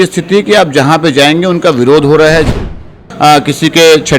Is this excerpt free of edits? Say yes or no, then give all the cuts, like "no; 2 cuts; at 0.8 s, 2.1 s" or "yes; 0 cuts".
no; 1 cut; at 2.8 s